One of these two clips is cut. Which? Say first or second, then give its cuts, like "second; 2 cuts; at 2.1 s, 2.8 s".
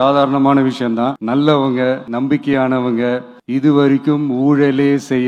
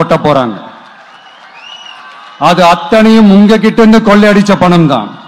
first; 3 cuts; at 1.2 s, 2.1 s, 3.3 s